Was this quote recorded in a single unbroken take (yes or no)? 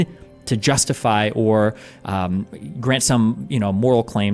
yes